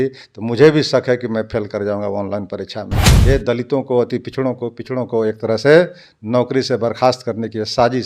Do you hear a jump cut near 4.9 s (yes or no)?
no